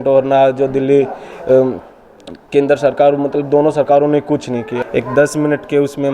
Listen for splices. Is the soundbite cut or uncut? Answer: cut